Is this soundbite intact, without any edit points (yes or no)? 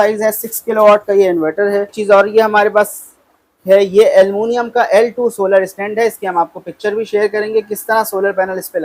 no